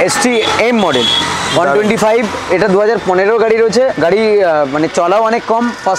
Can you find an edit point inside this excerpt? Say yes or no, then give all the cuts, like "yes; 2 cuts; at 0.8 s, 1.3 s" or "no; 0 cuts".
yes; 1 cut; at 3.9 s